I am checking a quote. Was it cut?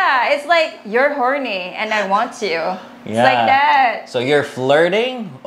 no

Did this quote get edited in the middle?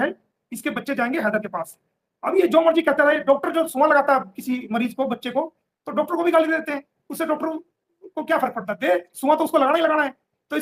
no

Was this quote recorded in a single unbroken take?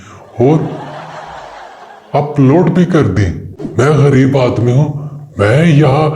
no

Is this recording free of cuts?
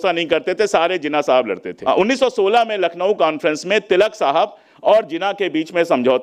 yes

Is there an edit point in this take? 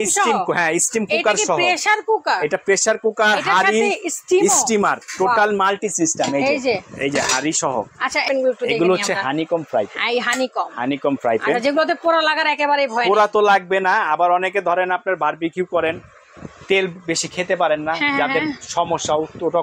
yes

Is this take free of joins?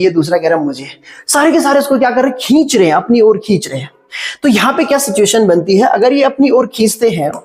yes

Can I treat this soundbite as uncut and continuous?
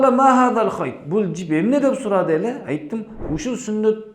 no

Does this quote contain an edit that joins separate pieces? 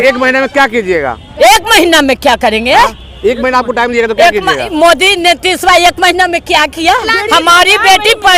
yes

